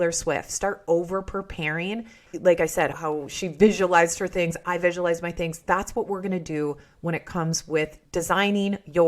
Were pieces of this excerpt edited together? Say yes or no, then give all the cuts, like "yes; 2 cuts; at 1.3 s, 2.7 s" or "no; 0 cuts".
yes; 2 cuts; at 2.2 s, 8.0 s